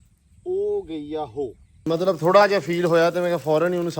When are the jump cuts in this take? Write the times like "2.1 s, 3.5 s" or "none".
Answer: 1.8 s